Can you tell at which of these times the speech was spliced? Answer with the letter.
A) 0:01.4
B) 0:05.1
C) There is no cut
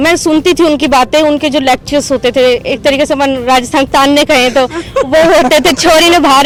C